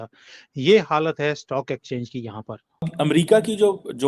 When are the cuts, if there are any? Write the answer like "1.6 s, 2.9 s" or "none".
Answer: 2.8 s